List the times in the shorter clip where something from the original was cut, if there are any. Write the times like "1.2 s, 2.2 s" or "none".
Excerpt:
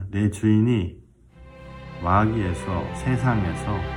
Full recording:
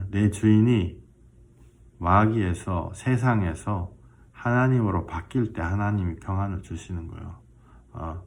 none